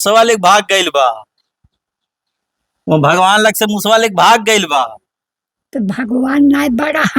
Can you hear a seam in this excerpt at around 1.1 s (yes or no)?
no